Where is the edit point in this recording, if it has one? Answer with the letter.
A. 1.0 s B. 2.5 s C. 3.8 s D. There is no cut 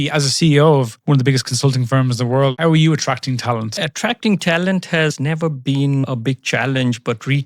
B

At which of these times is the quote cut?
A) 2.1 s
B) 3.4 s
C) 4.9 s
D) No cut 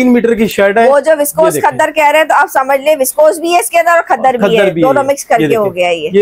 D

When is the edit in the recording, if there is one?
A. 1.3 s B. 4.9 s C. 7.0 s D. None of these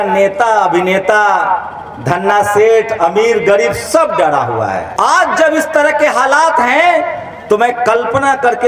B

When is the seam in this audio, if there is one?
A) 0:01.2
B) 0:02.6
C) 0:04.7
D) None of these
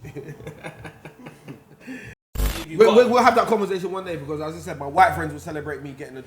B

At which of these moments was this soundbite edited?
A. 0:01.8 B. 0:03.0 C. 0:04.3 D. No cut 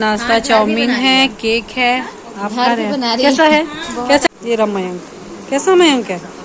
C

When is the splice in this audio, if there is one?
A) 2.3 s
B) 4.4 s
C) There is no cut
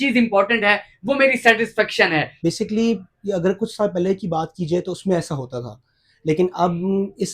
A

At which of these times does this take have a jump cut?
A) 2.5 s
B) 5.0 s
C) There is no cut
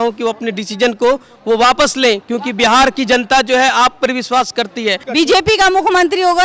B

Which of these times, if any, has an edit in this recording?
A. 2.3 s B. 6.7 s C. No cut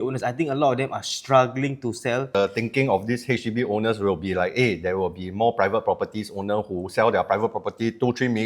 A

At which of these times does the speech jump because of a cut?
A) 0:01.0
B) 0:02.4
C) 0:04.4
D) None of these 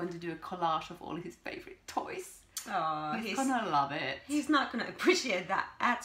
D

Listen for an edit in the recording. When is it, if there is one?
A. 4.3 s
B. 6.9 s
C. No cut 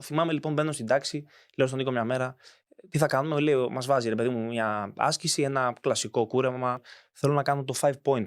B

